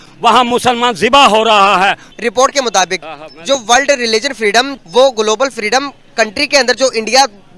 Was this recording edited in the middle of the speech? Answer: yes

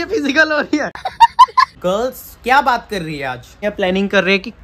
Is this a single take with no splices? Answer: no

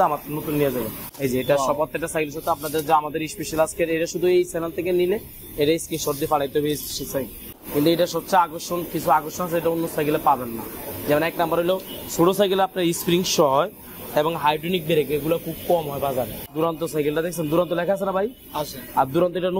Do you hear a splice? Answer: yes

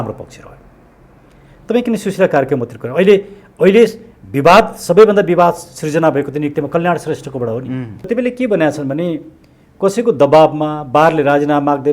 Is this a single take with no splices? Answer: no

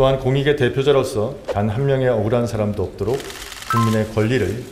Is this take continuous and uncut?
no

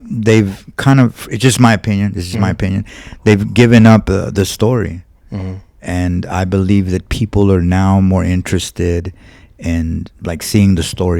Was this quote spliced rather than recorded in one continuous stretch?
no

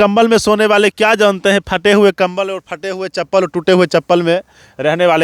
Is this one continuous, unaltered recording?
yes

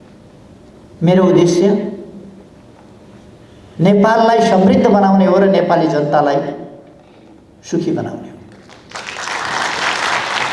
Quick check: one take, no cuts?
yes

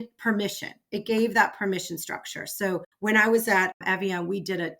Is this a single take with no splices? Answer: no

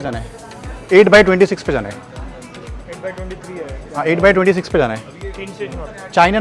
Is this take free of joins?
yes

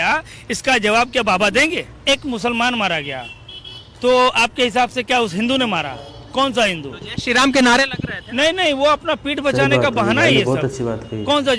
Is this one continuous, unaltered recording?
no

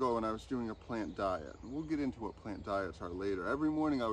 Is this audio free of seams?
yes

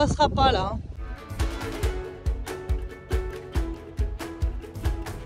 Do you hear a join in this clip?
yes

